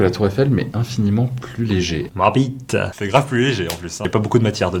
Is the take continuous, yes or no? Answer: no